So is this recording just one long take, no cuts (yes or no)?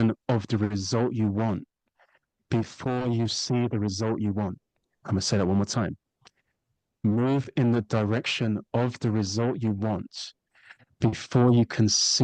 yes